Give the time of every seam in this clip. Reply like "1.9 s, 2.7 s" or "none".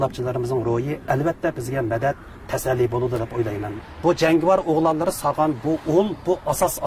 3.7 s